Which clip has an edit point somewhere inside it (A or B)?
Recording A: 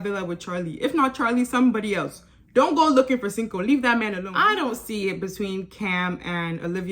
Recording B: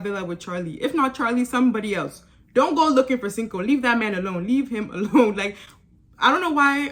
A